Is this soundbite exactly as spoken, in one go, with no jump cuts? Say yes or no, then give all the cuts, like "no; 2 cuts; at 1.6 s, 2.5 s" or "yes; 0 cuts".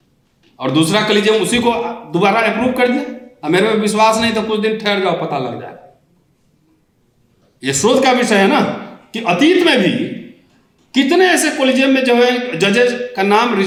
yes; 0 cuts